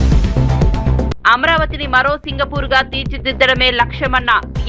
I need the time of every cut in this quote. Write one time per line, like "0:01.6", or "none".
0:01.1